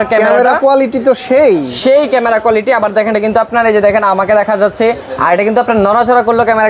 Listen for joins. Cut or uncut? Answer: uncut